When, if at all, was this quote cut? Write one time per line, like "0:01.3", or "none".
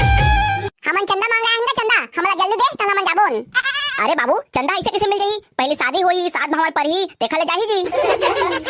none